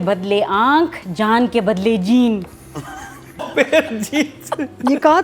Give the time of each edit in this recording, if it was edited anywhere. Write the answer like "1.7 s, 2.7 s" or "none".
3.4 s